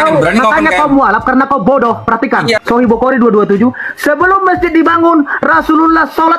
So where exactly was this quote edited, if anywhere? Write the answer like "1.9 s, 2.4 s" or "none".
2.6 s